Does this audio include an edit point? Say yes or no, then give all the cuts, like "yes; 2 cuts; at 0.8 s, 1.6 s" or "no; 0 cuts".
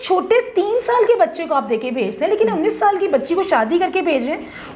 no; 0 cuts